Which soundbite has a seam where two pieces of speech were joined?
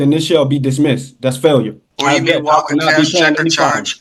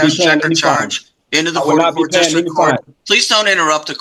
first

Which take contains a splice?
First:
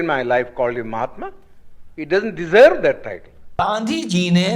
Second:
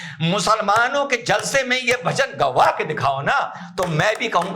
first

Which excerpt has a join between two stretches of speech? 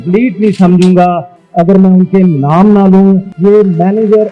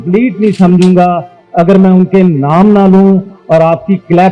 first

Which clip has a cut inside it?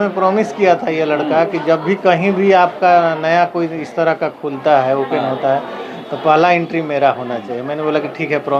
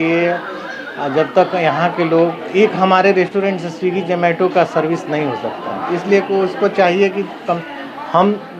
second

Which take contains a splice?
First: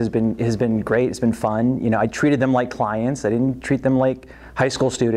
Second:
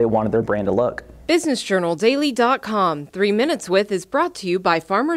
second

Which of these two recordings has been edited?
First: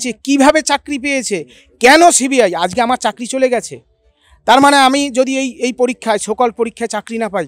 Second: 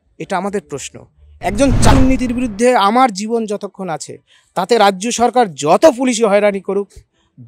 second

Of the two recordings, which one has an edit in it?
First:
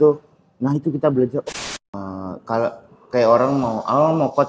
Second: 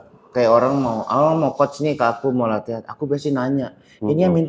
first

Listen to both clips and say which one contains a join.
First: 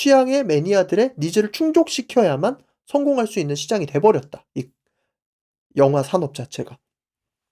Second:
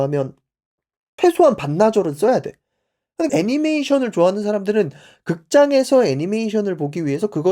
second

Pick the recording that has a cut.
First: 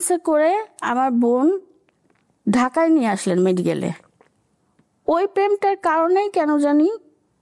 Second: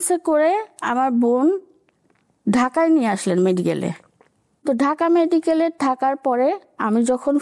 first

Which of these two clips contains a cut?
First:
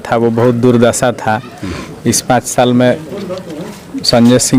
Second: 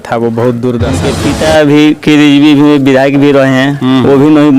second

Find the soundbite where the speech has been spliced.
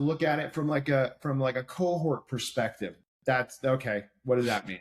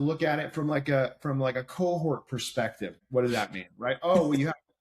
second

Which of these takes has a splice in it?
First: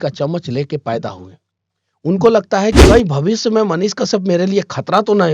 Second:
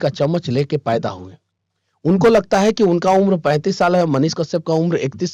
first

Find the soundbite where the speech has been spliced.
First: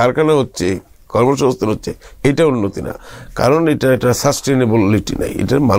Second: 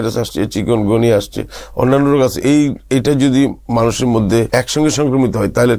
second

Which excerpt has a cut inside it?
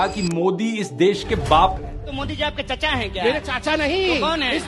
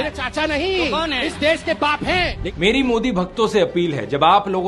second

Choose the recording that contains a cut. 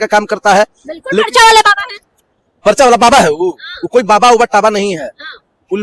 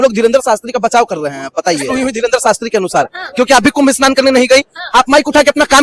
second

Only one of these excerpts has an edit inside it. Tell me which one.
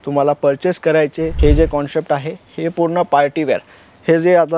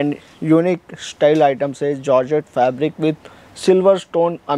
first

